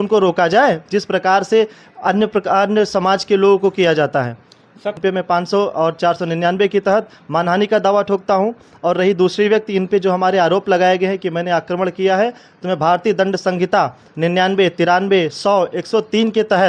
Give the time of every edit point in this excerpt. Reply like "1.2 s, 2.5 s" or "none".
5.0 s